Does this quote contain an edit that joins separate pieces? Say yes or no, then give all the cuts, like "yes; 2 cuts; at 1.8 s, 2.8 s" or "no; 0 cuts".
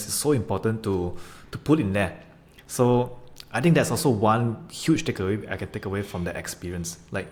no; 0 cuts